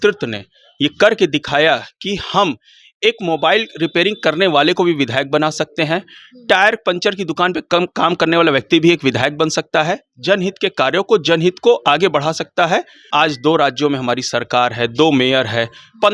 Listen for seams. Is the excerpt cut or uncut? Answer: cut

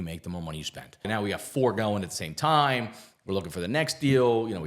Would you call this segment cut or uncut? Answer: cut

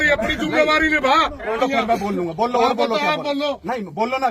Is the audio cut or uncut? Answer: cut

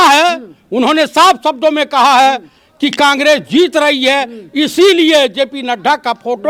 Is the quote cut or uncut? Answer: uncut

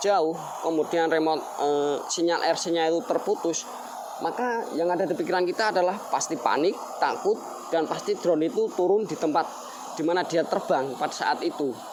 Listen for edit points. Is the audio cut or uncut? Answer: uncut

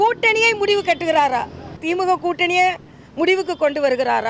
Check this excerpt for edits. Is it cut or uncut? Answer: cut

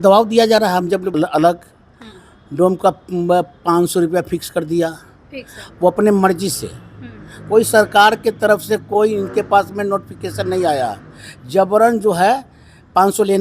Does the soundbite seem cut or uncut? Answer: cut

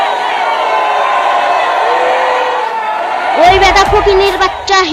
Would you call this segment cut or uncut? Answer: cut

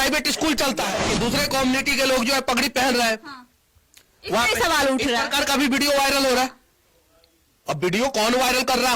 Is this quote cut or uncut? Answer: cut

